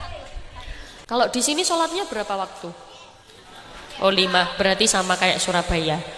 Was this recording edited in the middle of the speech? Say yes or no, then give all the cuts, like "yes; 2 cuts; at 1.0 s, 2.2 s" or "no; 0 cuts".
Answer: yes; 1 cut; at 1.0 s